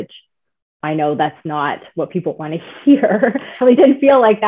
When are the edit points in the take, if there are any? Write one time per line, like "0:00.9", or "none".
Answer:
0:03.6